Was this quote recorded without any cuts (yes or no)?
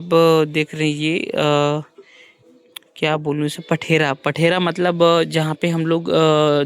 yes